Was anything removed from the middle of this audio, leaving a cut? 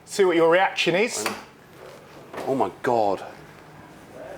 no; 0 cuts

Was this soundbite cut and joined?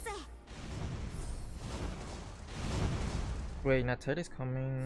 no; 0 cuts

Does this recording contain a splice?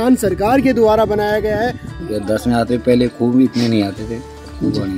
yes; 1 cut; at 1.9 s

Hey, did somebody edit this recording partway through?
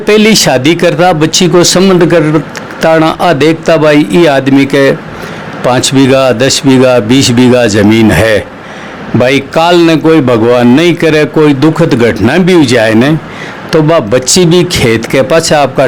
no; 0 cuts

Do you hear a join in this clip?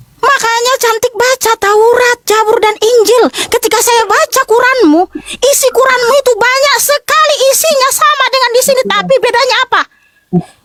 no; 0 cuts

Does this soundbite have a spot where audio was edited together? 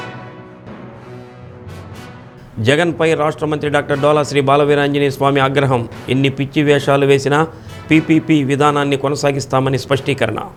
no; 0 cuts

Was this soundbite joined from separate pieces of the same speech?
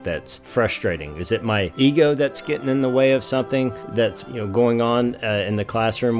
yes; 1 cut; at 3.9 s

